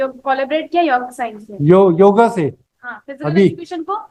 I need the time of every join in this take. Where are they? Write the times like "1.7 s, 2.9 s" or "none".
none

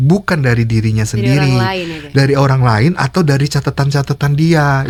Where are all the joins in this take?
none

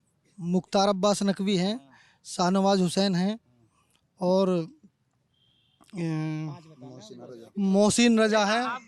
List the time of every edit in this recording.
none

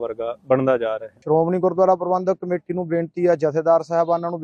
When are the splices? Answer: 1.1 s

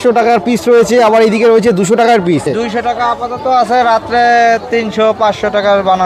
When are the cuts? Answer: 2.5 s

